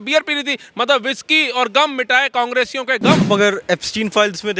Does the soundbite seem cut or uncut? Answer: cut